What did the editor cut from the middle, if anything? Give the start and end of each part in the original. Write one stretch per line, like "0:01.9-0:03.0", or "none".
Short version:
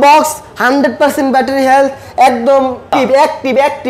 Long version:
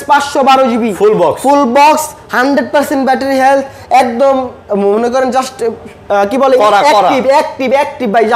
0:04.7-0:07.1